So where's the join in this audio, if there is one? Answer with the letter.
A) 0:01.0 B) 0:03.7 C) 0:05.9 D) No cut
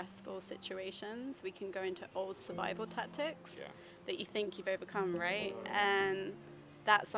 D